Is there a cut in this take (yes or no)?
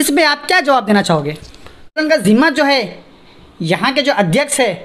yes